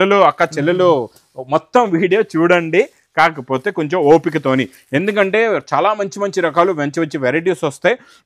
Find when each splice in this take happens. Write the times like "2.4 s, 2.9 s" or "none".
none